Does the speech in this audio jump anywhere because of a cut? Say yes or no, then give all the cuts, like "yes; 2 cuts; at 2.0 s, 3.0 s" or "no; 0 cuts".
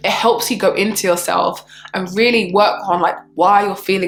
no; 0 cuts